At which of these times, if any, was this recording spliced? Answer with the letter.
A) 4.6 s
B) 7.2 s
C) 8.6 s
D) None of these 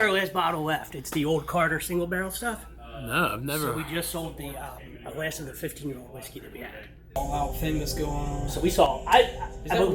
B